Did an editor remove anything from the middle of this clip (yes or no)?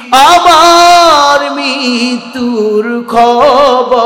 no